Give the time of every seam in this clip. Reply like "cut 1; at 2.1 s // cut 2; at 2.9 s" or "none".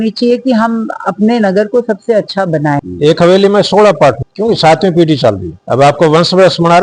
cut 1; at 2.8 s // cut 2; at 4.2 s // cut 3; at 5.5 s